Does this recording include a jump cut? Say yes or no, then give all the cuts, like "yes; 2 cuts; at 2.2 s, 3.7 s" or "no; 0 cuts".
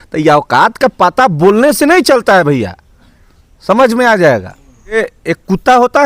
yes; 1 cut; at 5.0 s